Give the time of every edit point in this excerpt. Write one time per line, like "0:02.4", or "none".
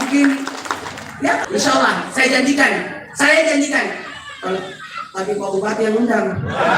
0:01.4